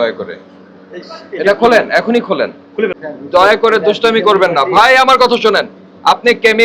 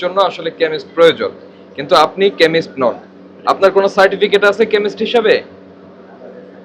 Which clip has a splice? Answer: first; 1 cut; at 3.1 s

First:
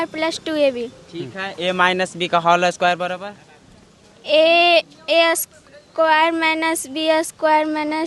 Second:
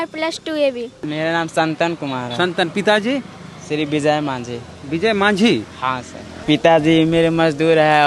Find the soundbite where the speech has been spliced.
second; 2 cuts; at 1.1 s, 6.3 s

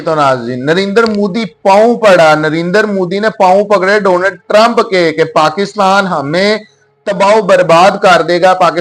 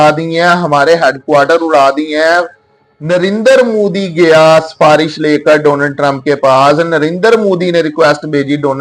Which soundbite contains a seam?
first; 1 cut; at 5.4 s

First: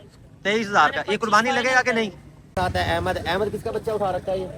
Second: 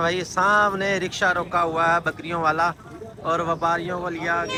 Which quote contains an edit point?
first; 1 cut; at 2.5 s

